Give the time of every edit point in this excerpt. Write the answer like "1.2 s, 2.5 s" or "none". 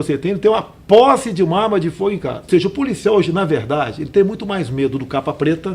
2.5 s

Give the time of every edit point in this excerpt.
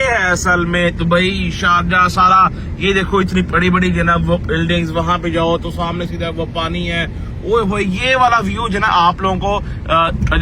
none

